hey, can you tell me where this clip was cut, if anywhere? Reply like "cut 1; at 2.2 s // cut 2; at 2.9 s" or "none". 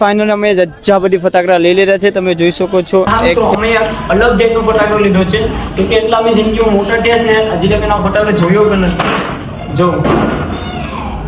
cut 1; at 3.2 s